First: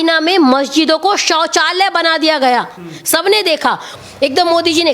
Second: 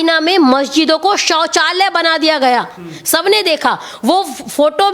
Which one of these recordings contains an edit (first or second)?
first